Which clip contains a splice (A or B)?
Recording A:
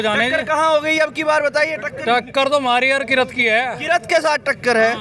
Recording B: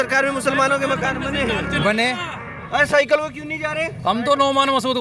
B